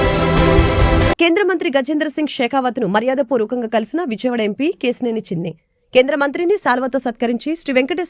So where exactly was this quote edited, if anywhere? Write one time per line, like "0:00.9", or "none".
0:01.1